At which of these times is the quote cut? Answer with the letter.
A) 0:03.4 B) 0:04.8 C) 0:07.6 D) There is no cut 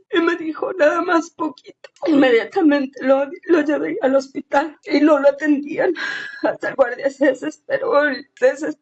B